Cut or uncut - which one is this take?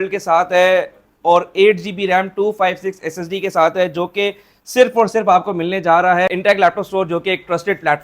cut